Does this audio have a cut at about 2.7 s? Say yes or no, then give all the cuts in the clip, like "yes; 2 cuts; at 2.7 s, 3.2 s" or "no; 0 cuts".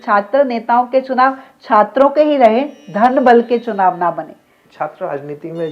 no; 1 cut; at 4.6 s